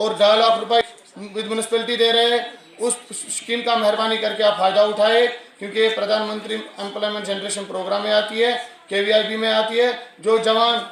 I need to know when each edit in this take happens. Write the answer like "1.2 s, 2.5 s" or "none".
1.0 s